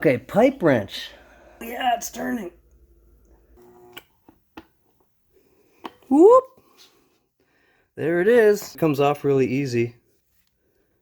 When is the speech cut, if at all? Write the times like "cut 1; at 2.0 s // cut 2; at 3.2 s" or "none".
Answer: cut 1; at 1.7 s // cut 2; at 3.6 s // cut 3; at 8.7 s